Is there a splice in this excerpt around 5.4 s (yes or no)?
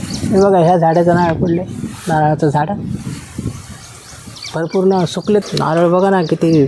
yes